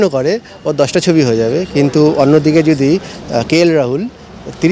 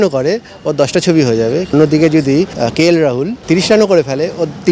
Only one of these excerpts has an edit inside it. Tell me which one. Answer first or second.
second